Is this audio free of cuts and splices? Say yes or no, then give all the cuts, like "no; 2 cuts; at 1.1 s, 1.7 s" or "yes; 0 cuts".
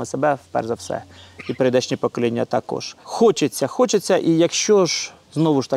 yes; 0 cuts